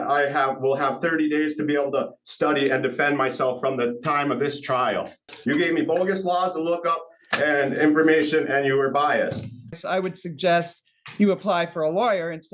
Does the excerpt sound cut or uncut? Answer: cut